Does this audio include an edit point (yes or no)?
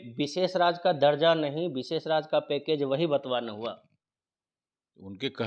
no